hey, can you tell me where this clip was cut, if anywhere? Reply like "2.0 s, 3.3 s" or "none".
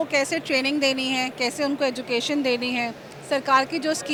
none